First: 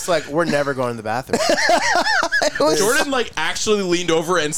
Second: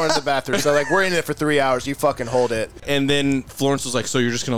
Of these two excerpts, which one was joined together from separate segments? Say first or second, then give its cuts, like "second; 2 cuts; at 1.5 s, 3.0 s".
second; 1 cut; at 2.8 s